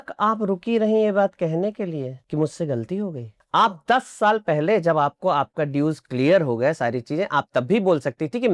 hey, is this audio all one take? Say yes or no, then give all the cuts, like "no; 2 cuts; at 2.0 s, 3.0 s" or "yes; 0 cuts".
no; 2 cuts; at 2.2 s, 3.3 s